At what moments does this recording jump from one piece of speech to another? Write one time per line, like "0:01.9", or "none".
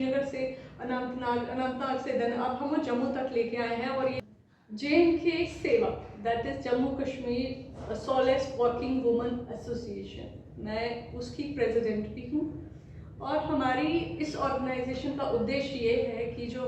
0:04.2